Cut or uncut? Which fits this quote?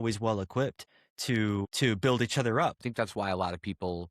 cut